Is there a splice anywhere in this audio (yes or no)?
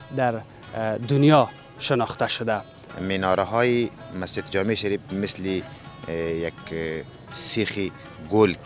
yes